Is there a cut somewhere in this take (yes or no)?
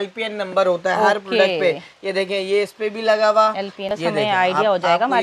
yes